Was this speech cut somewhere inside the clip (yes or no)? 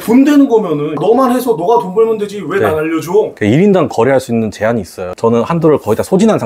yes